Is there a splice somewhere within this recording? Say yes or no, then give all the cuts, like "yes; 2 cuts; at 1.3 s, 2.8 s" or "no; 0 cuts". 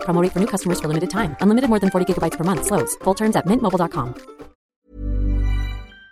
yes; 1 cut; at 4.6 s